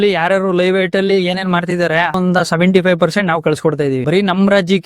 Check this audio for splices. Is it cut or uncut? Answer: cut